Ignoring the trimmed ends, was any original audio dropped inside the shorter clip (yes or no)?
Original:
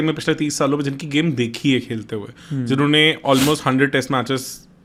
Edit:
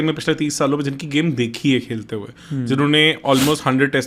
no